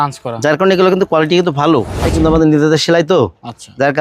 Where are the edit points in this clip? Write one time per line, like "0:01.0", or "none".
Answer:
0:02.1